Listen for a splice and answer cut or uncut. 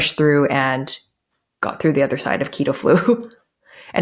uncut